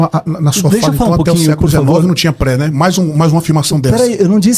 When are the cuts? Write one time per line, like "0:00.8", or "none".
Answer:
none